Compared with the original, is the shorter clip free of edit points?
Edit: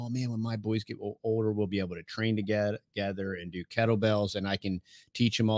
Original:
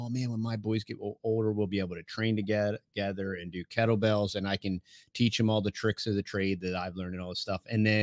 yes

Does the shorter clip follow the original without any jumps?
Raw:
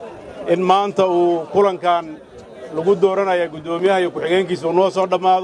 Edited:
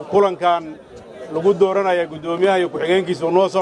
yes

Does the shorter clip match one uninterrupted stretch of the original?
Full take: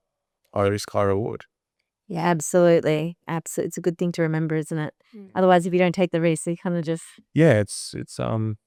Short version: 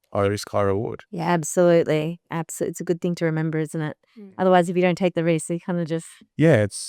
no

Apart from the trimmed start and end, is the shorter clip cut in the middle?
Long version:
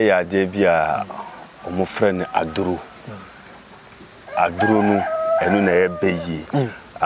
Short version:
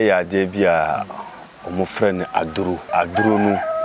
yes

